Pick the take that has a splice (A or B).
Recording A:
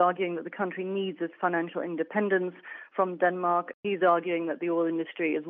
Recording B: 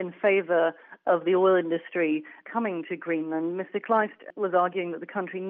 A